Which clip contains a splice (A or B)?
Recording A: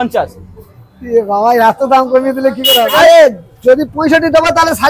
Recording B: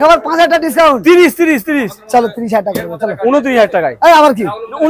A